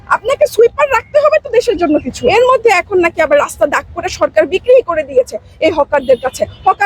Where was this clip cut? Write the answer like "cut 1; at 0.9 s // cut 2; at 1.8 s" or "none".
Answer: cut 1; at 2.1 s